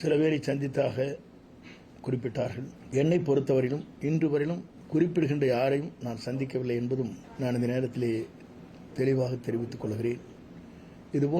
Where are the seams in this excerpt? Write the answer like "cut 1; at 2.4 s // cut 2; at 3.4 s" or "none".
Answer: cut 1; at 2.8 s // cut 2; at 4.7 s // cut 3; at 7.2 s